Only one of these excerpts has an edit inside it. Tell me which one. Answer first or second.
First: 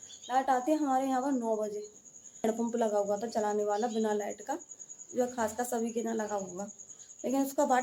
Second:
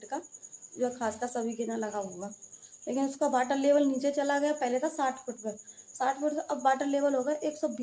first